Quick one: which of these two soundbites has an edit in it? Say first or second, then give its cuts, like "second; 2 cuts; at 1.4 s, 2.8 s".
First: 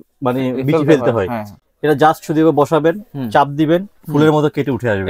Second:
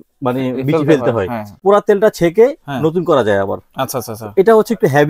second; 1 cut; at 1.6 s